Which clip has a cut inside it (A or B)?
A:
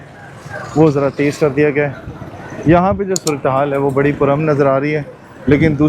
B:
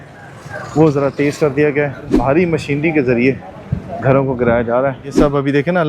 B